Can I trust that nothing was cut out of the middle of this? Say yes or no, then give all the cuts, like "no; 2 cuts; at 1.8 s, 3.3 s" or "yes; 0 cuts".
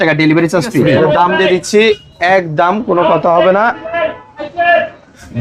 no; 1 cut; at 0.9 s